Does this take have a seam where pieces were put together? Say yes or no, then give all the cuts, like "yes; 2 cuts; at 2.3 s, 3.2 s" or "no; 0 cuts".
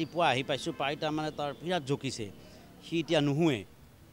no; 0 cuts